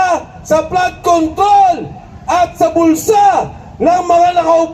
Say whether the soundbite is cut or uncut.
uncut